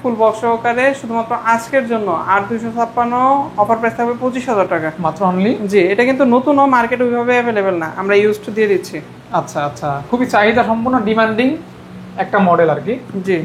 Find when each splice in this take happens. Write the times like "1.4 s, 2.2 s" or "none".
none